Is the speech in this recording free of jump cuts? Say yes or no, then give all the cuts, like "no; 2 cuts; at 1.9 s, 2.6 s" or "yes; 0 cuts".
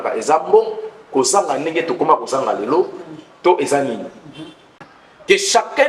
no; 1 cut; at 4.9 s